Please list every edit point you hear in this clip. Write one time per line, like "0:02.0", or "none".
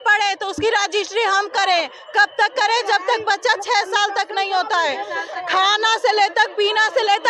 none